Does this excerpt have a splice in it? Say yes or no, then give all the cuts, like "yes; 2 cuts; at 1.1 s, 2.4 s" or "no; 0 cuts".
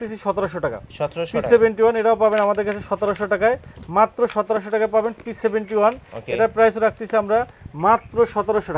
no; 0 cuts